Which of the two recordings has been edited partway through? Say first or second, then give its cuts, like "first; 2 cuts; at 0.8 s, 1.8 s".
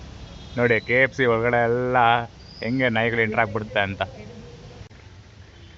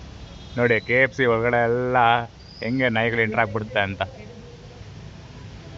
first; 1 cut; at 4.9 s